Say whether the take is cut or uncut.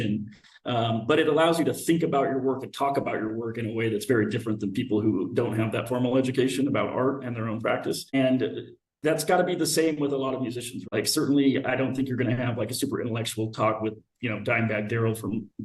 cut